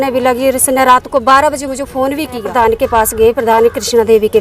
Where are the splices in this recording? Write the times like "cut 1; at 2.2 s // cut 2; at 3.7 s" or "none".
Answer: cut 1; at 2.5 s